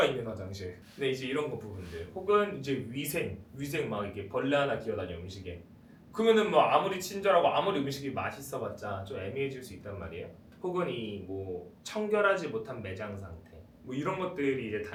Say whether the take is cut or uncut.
uncut